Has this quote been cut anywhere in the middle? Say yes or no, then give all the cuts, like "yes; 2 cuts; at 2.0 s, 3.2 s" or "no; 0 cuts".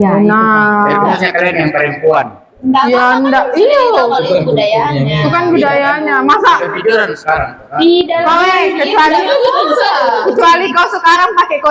no; 0 cuts